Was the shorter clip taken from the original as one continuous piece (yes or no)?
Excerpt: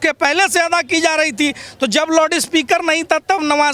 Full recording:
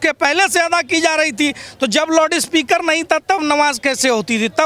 yes